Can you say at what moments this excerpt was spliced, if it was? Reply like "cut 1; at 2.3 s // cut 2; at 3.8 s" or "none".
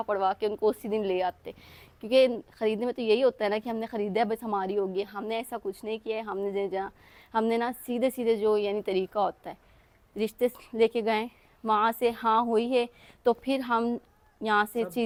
none